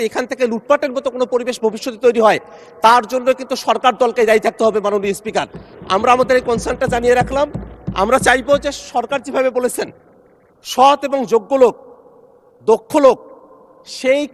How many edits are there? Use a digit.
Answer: 0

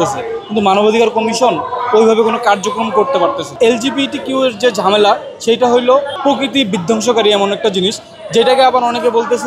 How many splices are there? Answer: 2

